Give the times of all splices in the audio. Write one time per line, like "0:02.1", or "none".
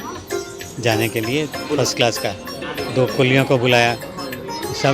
0:02.7